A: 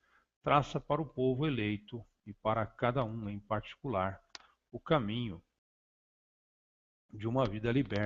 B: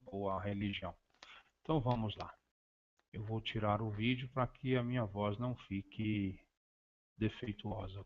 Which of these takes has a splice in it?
B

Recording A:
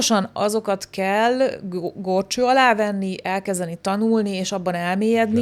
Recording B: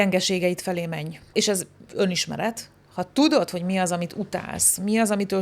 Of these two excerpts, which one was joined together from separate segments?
B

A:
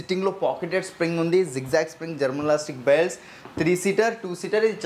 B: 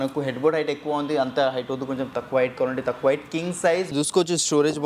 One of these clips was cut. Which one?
B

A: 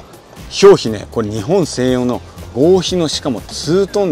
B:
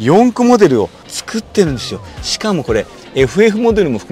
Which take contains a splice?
B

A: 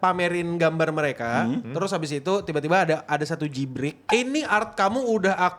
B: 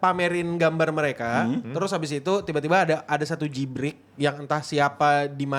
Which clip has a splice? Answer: A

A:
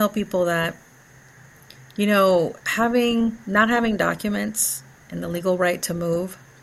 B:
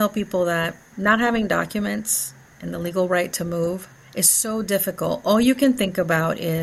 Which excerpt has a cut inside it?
B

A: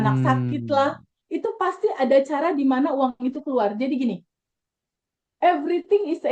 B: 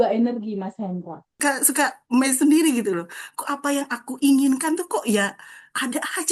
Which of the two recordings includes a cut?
B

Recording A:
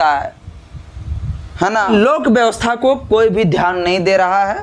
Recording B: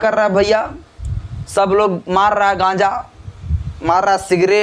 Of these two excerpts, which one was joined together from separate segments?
A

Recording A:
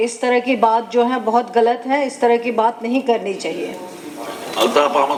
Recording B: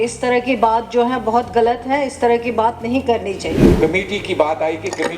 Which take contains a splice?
B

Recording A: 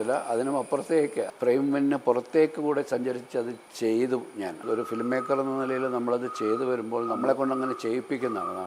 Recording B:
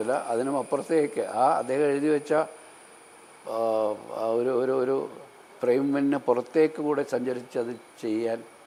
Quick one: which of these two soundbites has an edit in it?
A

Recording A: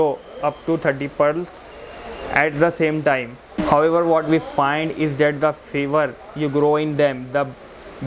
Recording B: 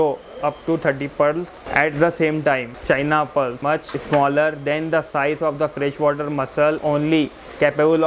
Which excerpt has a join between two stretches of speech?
B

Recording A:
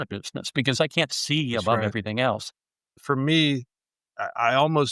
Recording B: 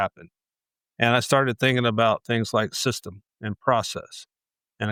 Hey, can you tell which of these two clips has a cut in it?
A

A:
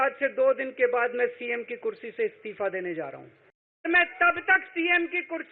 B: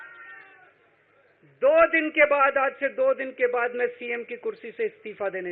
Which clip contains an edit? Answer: A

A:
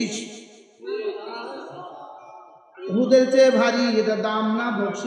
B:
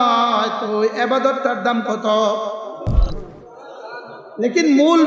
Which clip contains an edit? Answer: B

